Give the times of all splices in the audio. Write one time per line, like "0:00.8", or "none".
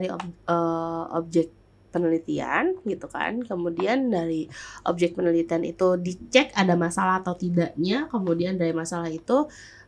none